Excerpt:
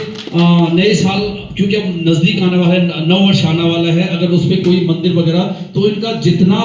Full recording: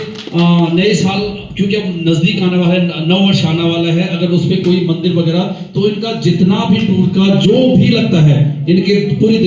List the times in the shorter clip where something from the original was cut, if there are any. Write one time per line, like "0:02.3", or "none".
none